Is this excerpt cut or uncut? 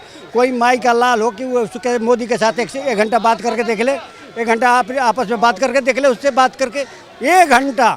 uncut